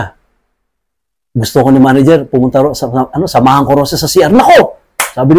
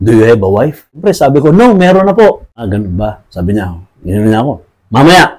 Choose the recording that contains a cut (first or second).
second